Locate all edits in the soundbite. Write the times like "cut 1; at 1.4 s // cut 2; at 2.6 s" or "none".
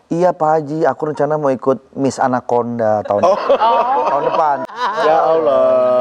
cut 1; at 4.7 s